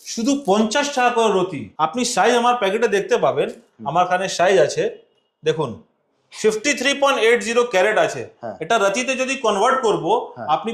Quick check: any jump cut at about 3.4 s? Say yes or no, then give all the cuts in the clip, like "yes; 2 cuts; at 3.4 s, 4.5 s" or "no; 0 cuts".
no; 1 cut; at 1.6 s